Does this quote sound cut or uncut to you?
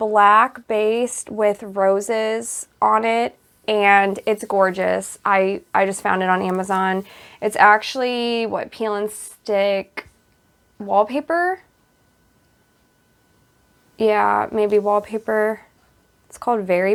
uncut